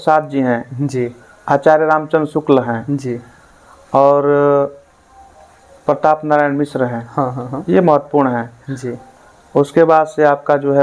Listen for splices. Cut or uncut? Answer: uncut